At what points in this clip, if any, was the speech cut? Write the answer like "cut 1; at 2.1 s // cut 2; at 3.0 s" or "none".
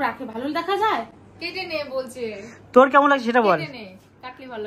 none